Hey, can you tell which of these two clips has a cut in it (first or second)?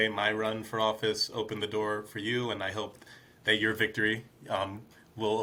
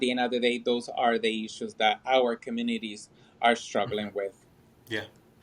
second